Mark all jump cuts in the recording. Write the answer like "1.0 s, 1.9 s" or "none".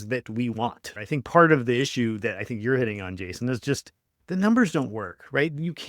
0.9 s